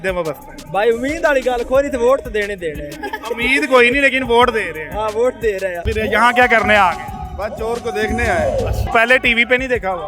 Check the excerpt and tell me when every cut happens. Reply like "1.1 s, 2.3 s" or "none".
5.8 s, 8.9 s